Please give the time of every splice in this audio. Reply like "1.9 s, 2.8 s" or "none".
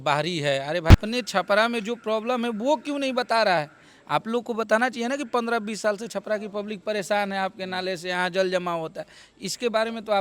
0.9 s

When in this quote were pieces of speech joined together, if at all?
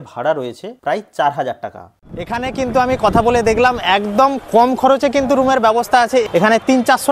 2.3 s, 6.3 s

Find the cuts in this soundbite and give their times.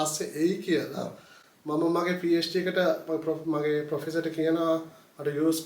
none

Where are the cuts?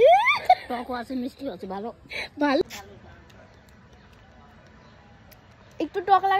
2.6 s

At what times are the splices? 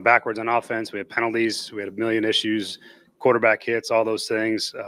none

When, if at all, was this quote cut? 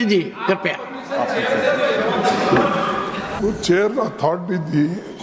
3.4 s

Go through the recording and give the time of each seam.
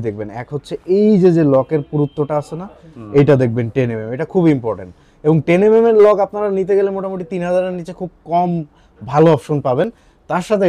none

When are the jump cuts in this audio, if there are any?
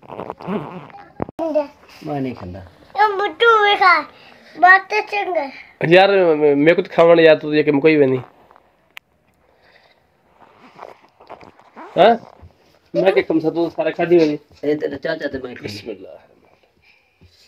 1.4 s

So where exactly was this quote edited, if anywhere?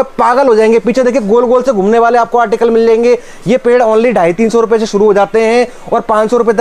none

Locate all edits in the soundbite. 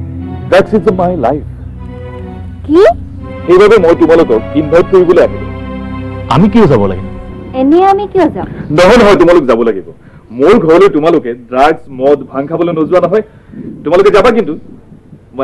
none

